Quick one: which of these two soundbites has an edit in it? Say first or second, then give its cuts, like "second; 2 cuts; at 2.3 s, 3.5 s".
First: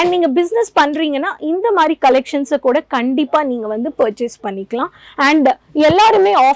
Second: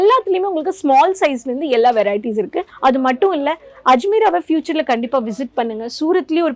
second; 1 cut; at 2.6 s